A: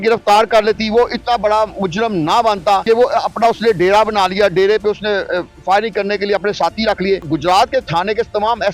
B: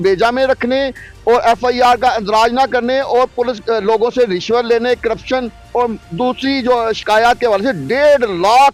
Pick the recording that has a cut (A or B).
A